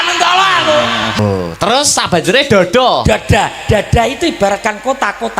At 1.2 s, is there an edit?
yes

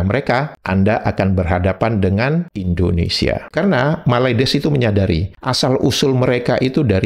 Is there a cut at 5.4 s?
no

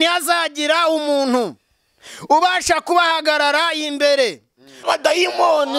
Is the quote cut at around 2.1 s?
no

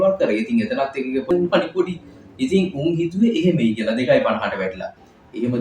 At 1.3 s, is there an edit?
yes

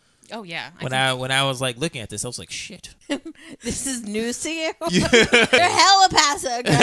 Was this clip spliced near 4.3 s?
no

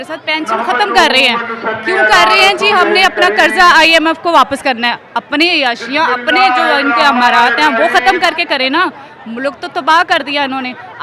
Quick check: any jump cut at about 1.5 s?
no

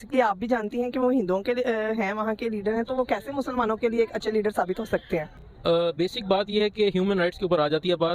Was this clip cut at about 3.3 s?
no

